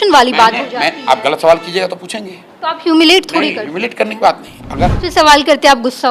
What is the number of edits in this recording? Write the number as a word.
one